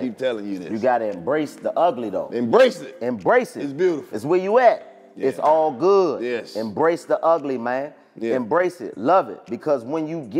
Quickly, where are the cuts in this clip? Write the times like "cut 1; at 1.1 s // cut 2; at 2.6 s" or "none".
none